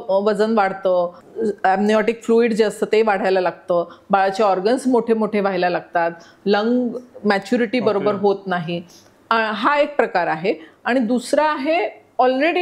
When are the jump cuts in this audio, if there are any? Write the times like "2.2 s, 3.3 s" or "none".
1.2 s